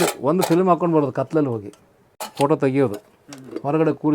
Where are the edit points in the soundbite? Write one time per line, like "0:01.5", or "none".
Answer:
0:02.3